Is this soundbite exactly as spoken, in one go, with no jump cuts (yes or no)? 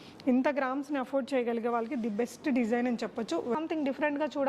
no